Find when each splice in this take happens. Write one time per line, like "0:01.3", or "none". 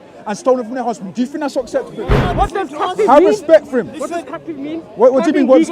0:02.2